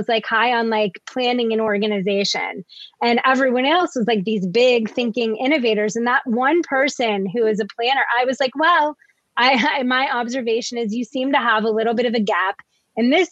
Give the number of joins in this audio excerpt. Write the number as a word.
zero